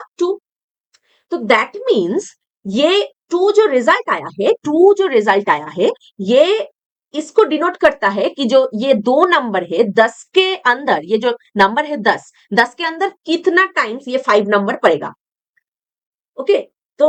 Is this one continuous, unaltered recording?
yes; 0 cuts

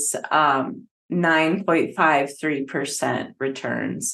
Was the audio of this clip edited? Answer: no; 0 cuts

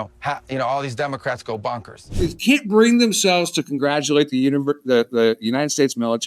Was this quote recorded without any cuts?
no; 1 cut; at 2.1 s

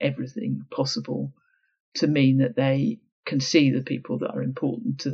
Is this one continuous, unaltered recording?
yes; 0 cuts

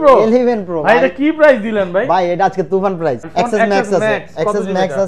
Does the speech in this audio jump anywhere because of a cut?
yes; 1 cut; at 3.2 s

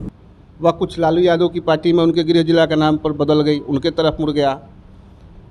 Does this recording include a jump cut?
no; 0 cuts

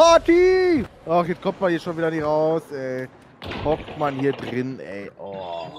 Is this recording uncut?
no; 1 cut; at 1.0 s

